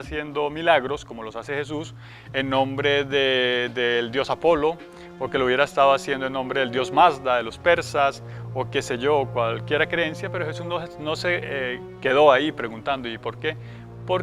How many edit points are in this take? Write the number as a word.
one